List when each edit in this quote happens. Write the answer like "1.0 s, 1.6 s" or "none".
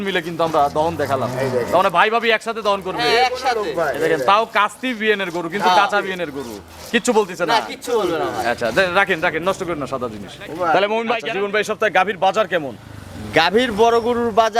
11.3 s